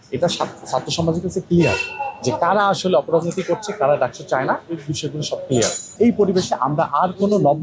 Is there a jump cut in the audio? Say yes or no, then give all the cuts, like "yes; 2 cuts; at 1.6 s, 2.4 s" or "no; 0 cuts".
yes; 1 cut; at 5.8 s